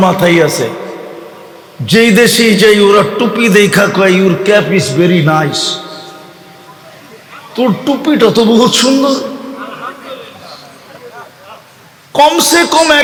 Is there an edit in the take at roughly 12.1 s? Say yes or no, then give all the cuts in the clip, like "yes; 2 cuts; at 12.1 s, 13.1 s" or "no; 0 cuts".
no; 0 cuts